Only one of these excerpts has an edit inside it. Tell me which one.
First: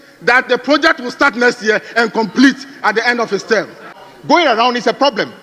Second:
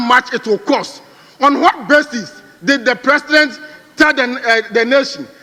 first; 1 cut; at 4.1 s

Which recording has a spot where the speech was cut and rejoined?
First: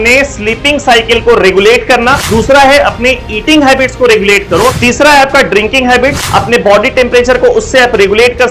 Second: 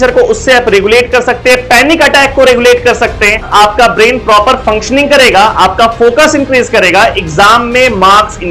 first; 3 cuts; at 2.2 s, 4.8 s, 6.2 s

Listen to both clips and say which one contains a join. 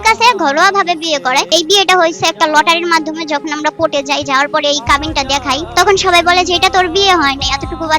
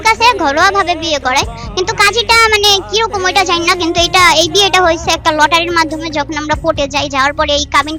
first; 2 cuts; at 1.5 s, 5.7 s

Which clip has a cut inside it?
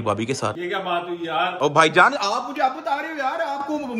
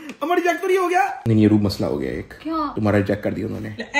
second; 1 cut; at 1.1 s

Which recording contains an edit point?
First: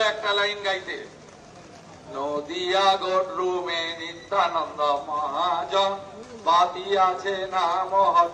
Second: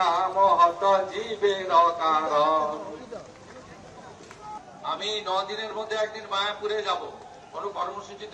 second; 1 cut; at 4.6 s

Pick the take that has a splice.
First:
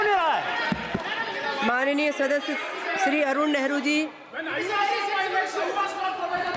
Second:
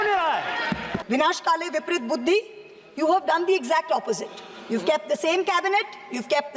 second; 1 cut; at 1.0 s

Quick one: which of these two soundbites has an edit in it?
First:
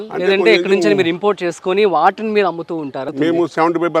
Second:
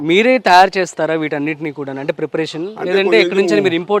first; 1 cut; at 3.1 s

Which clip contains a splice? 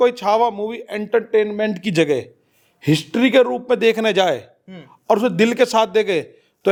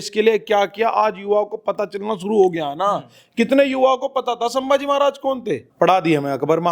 second; 1 cut; at 5.7 s

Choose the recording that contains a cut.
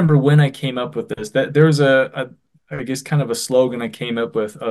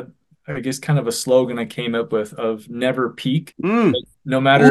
second; 1 cut; at 3.5 s

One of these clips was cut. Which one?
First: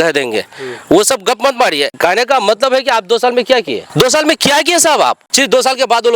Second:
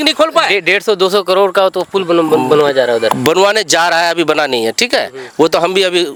first; 3 cuts; at 1.9 s, 3.8 s, 5.3 s

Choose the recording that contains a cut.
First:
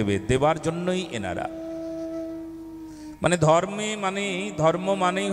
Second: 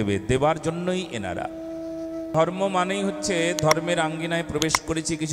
second; 1 cut; at 2.3 s

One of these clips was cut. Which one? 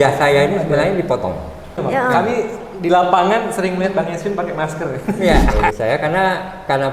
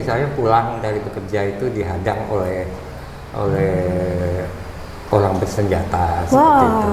first; 2 cuts; at 1.8 s, 5.7 s

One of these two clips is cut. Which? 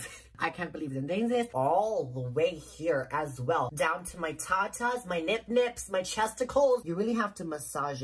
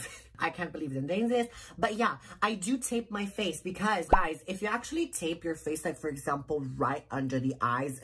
first; 3 cuts; at 1.5 s, 3.7 s, 6.8 s

